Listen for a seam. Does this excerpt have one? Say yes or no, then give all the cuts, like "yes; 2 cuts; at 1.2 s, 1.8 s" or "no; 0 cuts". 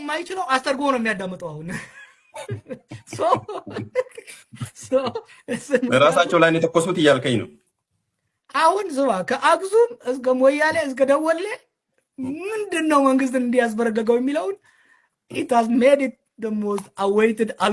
no; 0 cuts